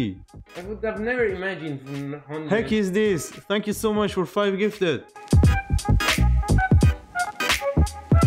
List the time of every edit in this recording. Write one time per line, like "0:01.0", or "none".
0:05.1